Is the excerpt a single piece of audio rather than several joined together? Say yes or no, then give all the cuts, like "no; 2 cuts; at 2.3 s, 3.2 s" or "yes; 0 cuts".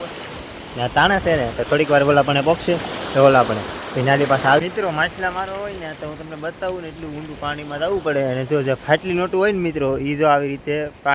no; 1 cut; at 4.6 s